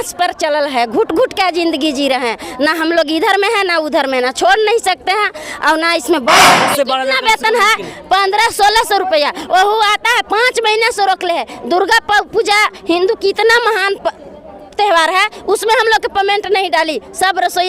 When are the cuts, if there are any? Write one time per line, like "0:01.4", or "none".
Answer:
0:06.6